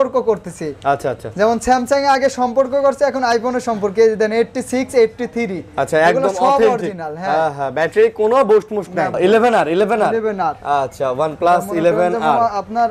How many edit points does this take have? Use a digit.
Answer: 1